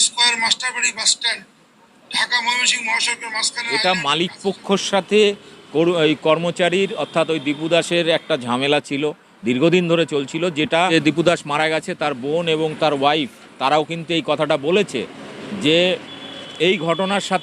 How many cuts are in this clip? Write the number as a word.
two